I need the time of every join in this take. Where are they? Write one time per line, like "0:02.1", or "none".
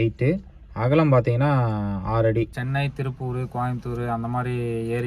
0:02.6

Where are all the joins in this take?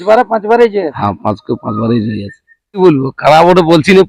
0:02.8

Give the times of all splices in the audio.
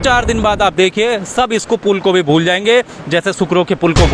none

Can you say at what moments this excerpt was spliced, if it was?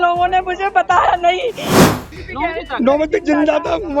0:01.8

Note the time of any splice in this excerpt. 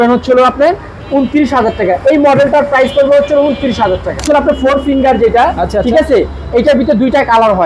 0:04.2

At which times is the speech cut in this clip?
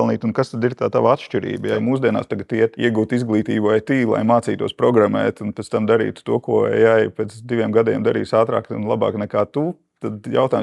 0:01.7
0:02.8

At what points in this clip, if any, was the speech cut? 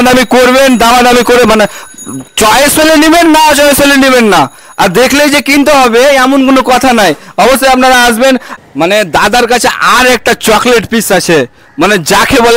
0:08.5

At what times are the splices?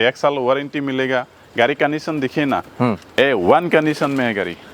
none

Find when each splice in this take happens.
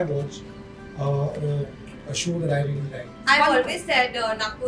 0:03.1

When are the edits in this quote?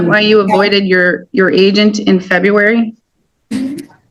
none

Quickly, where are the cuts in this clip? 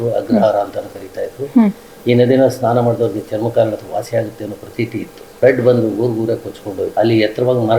0:02.0
0:05.3
0:06.9

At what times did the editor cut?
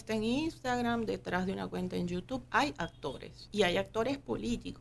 0:03.4

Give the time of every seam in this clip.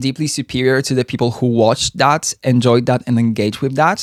none

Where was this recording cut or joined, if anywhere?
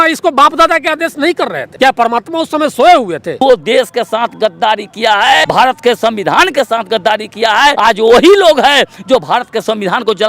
0:01.6
0:03.4
0:05.4
0:07.8

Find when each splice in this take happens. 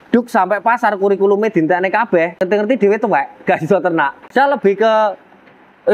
0:02.4
0:04.2

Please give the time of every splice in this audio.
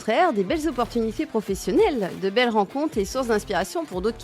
none

